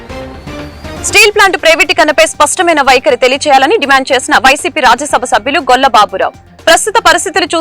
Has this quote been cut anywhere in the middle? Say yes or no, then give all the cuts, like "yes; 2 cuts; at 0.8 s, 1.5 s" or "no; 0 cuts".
yes; 1 cut; at 1.0 s